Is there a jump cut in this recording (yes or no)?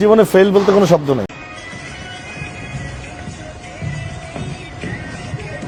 no